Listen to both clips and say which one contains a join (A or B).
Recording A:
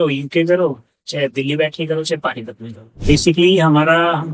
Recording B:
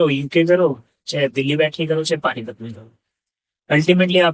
A